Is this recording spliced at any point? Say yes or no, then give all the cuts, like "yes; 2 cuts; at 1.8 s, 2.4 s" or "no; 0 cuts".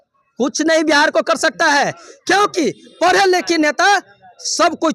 no; 0 cuts